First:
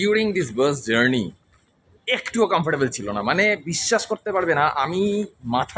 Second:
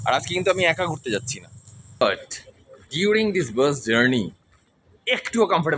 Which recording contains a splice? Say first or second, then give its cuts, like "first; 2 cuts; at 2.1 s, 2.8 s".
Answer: second; 1 cut; at 2.0 s